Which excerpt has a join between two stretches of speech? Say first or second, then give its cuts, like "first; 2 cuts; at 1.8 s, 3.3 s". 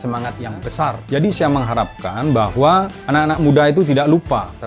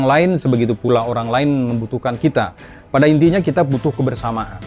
first; 2 cuts; at 1.0 s, 3.0 s